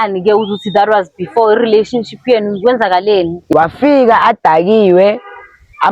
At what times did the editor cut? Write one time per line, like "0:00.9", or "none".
0:03.5